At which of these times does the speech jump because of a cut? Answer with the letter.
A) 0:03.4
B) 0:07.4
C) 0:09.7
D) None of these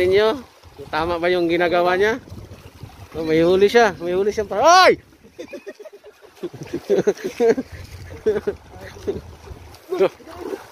C